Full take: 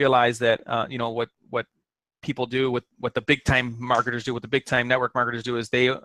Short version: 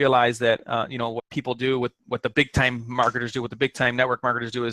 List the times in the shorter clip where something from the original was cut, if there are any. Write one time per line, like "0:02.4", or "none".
0:01.2